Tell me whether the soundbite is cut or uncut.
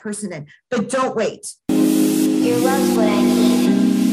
cut